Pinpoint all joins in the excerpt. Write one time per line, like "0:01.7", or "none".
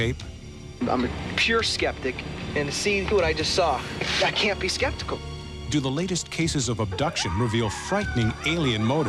none